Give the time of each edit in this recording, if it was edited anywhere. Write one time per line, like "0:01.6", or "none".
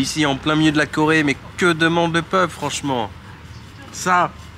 none